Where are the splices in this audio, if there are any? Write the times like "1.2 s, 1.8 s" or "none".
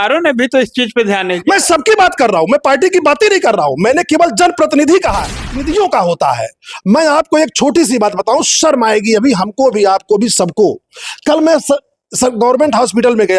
5.6 s